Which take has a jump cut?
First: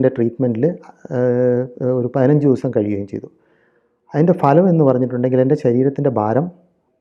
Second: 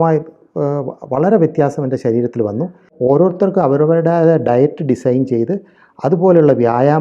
second; 1 cut; at 2.9 s

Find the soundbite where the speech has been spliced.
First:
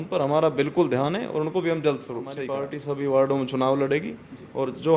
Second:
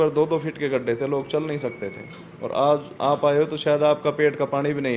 first; 1 cut; at 2.4 s

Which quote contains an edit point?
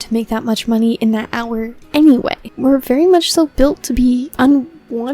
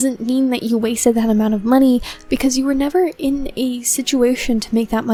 first; 3 cuts; at 1.8 s, 2.5 s, 4.3 s

